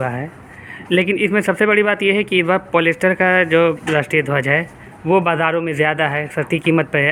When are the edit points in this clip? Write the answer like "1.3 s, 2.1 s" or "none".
none